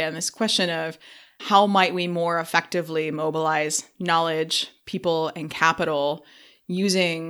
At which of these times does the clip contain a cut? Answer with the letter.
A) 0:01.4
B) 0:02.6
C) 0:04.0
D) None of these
A